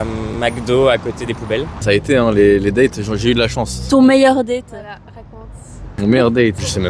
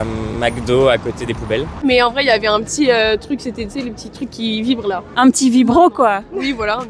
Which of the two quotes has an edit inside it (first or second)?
second